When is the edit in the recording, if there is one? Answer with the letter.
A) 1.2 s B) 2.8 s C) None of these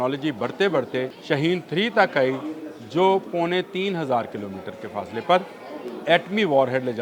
A